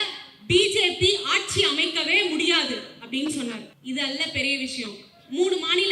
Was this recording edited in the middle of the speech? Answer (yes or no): yes